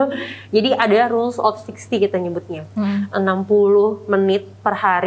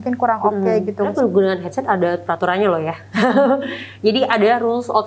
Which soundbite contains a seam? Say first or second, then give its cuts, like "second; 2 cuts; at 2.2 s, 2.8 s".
second; 1 cut; at 1.1 s